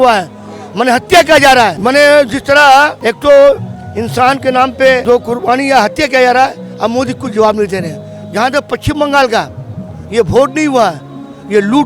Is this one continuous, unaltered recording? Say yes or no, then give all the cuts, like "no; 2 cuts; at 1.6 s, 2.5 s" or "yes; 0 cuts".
no; 3 cuts; at 1.8 s, 3.0 s, 5.0 s